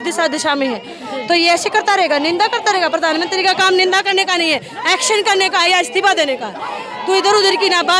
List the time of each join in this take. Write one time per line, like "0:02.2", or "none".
none